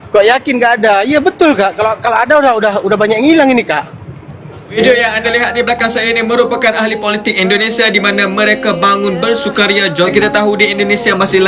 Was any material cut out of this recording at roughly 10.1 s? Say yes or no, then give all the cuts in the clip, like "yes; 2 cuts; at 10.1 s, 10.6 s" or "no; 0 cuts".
yes; 2 cuts; at 4.8 s, 10.1 s